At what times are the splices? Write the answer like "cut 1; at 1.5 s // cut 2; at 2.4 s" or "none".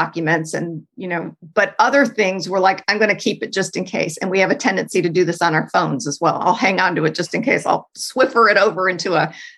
cut 1; at 8.0 s